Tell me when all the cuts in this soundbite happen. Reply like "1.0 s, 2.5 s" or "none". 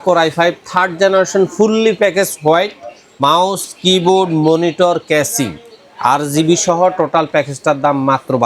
none